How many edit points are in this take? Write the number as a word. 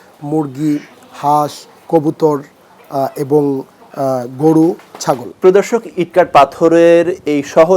one